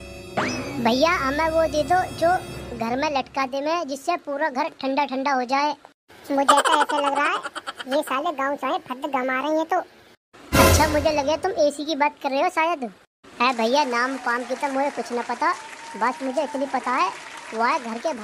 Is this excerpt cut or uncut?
uncut